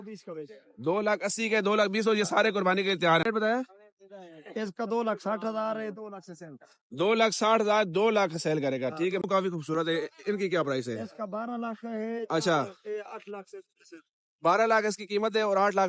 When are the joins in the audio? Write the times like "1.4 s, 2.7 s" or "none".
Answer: 3.2 s, 9.2 s